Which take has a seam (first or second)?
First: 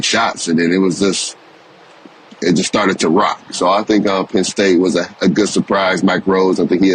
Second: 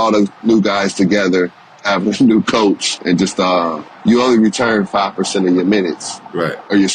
second